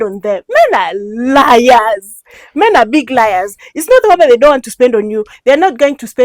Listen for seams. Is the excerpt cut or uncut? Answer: uncut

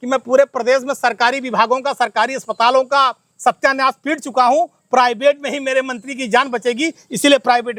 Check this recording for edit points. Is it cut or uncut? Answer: uncut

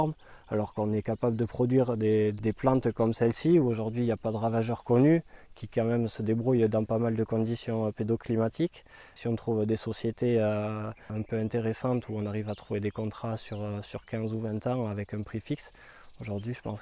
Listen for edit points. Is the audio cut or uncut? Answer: cut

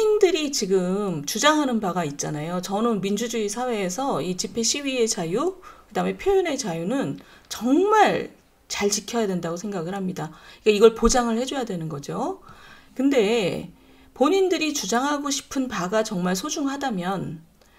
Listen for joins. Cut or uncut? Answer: uncut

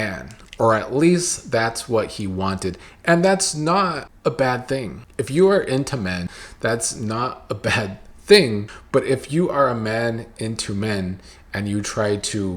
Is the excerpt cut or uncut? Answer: cut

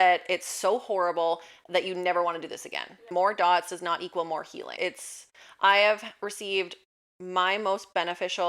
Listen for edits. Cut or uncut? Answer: cut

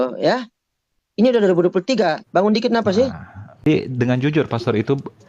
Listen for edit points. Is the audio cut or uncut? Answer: cut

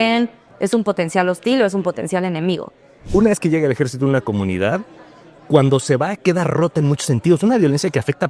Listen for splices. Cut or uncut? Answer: cut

